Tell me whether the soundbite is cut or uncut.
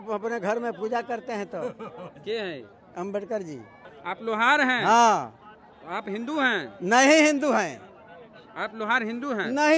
cut